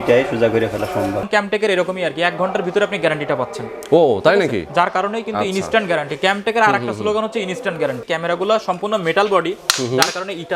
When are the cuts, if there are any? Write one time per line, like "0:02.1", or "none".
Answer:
0:01.3
0:08.0